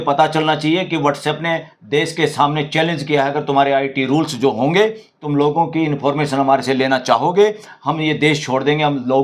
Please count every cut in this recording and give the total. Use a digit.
0